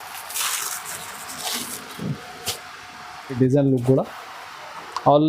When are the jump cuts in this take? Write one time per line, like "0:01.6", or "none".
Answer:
0:03.3